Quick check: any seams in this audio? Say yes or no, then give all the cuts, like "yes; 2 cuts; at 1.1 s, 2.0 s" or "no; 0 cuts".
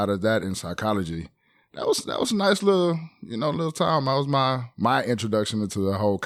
no; 0 cuts